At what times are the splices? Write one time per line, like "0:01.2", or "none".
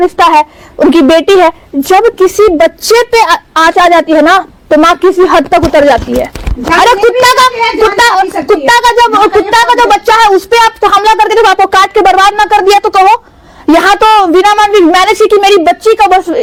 none